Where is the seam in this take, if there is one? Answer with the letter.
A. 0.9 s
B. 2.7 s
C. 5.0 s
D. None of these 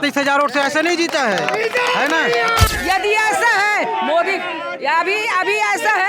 B